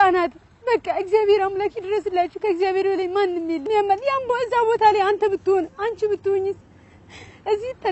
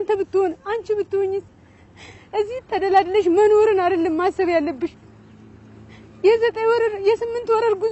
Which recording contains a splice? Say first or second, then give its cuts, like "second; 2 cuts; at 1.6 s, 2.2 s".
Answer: first; 1 cut; at 3.7 s